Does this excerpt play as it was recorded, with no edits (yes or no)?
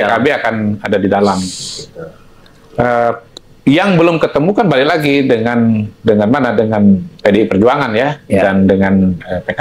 yes